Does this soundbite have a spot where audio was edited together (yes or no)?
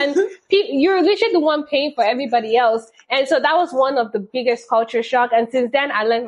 no